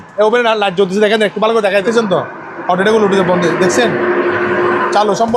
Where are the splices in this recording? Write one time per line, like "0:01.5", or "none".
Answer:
0:01.9